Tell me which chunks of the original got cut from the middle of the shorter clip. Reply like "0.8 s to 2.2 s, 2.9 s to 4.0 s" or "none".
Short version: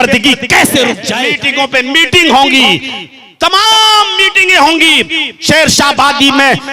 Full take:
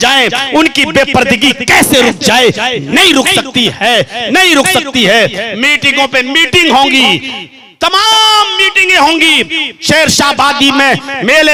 2.3 s to 5.5 s